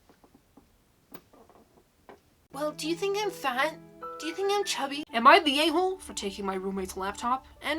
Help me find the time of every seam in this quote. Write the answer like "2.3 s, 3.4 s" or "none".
2.5 s, 5.0 s